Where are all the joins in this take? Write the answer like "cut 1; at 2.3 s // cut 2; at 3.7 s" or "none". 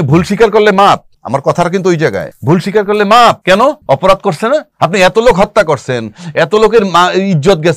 cut 1; at 1.1 s // cut 2; at 2.3 s // cut 3; at 3.6 s // cut 4; at 4.7 s